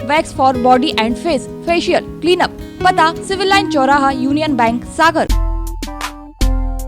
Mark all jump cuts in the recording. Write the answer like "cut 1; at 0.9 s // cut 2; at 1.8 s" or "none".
cut 1; at 5.3 s